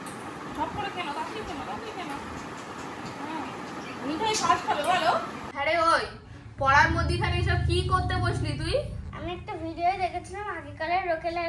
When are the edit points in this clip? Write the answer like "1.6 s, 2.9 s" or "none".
5.5 s